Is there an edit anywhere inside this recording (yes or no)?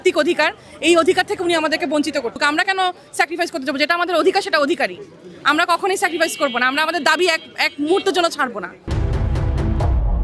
yes